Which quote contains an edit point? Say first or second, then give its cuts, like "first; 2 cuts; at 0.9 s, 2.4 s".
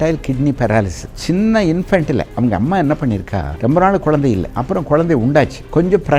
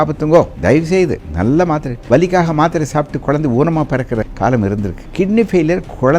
second; 4 cuts; at 0.9 s, 1.9 s, 4.3 s, 5.0 s